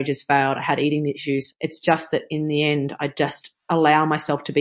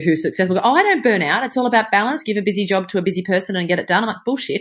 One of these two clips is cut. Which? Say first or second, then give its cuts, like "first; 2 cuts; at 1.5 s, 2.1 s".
first; 2 cuts; at 1.5 s, 3.5 s